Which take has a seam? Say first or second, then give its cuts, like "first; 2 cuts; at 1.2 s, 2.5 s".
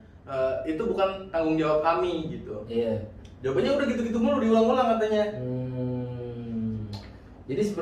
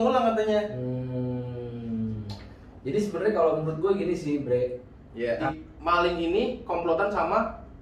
second; 1 cut; at 5.5 s